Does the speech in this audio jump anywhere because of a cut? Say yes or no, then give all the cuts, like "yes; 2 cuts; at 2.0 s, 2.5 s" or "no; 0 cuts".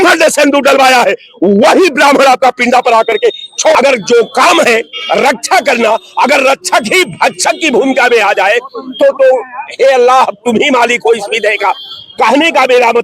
yes; 1 cut; at 3.7 s